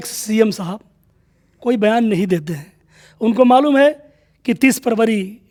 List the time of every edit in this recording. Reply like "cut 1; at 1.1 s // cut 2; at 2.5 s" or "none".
none